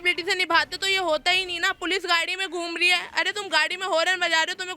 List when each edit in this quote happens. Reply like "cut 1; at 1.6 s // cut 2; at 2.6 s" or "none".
none